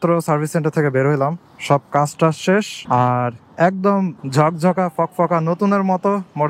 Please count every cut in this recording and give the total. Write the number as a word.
two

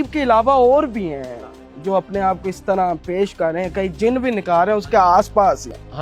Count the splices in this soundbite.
zero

